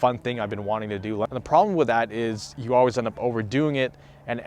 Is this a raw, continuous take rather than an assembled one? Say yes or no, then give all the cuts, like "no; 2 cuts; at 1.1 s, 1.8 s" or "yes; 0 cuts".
no; 1 cut; at 1.3 s